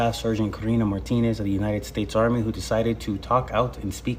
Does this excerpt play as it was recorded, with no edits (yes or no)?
yes